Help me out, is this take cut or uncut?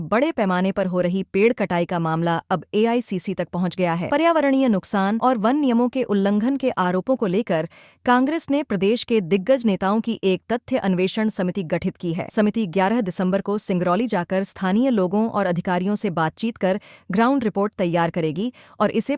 uncut